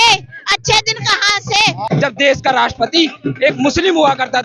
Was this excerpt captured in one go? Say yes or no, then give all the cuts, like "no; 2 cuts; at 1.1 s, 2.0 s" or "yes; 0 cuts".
no; 1 cut; at 1.8 s